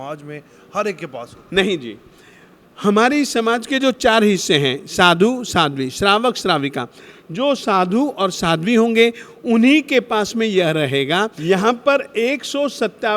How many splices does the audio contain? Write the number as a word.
one